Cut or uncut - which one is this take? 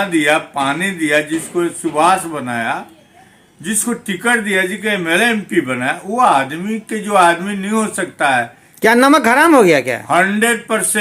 uncut